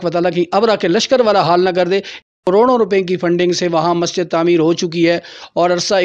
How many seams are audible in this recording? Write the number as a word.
one